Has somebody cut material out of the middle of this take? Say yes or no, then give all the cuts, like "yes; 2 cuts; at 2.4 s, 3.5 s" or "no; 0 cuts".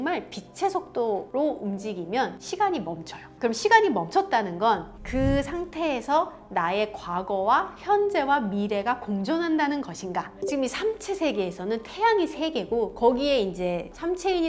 yes; 2 cuts; at 3.3 s, 10.4 s